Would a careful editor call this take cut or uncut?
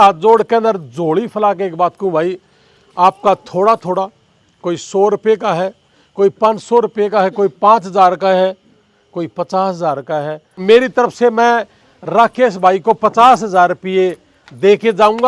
cut